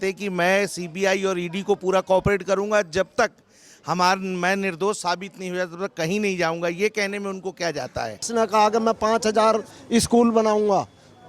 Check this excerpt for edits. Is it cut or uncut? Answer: cut